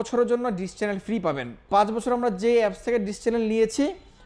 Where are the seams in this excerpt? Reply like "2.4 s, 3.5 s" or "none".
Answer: 1.6 s